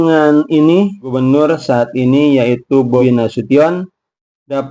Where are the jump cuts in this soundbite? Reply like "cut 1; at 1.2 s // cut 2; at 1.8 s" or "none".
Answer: cut 1; at 1.0 s // cut 2; at 3.0 s